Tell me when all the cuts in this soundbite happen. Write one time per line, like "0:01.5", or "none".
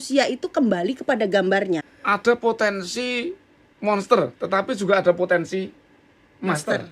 0:01.9

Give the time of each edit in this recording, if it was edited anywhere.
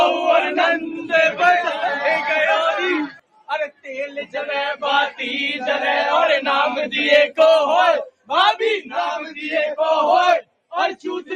0:03.2

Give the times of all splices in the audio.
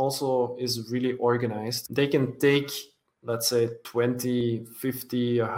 0:01.7
0:04.1

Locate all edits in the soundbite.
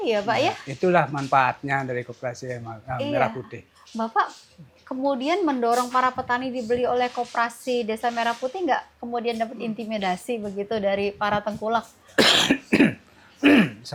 none

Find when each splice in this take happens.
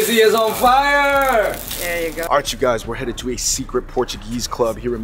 0:02.3

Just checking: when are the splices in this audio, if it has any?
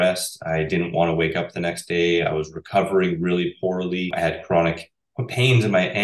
0:04.1

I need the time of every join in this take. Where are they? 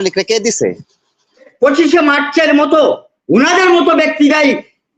0:01.5

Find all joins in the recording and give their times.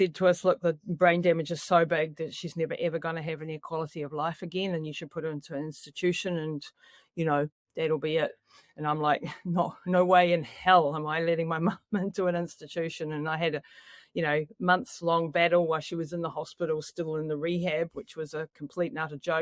none

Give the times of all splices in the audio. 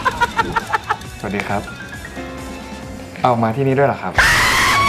0:00.9

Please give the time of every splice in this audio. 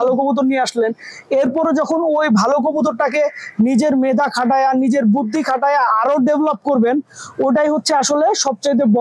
none

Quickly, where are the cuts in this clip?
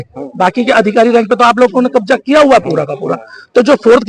none

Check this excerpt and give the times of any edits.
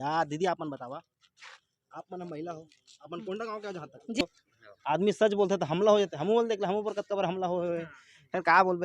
0:04.2

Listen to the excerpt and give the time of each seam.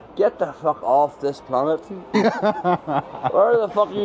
0:02.1

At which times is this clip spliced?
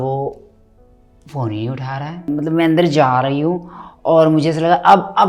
0:02.3

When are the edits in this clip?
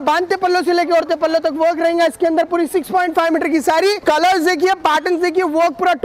0:04.0

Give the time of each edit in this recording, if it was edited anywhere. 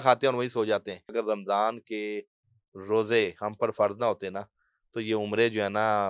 0:01.1

